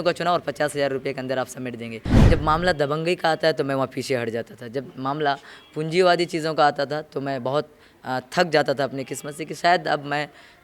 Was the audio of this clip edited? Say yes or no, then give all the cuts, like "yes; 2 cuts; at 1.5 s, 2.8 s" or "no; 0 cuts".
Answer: yes; 1 cut; at 2.1 s